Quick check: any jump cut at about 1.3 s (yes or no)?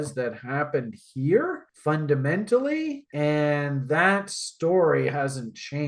no